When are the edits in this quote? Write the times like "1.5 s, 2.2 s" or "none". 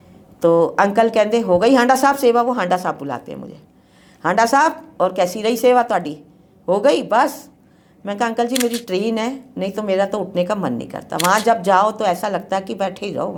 none